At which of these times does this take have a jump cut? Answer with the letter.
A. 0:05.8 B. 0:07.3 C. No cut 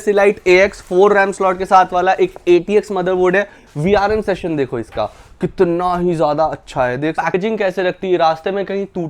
B